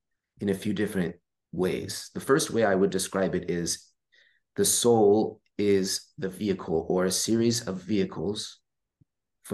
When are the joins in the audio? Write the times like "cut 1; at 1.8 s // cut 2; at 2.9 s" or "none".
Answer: none